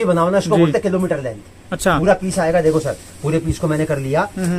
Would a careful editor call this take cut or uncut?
uncut